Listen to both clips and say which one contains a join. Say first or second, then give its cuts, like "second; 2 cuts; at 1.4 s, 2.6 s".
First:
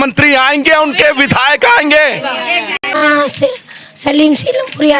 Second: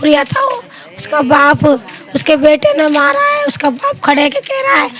first; 1 cut; at 2.8 s